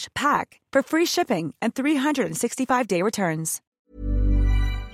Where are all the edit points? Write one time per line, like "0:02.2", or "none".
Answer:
0:03.7